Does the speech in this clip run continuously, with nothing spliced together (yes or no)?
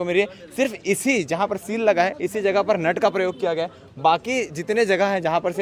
yes